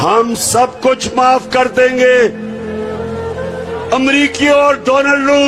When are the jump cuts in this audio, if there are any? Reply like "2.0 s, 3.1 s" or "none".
2.4 s, 3.9 s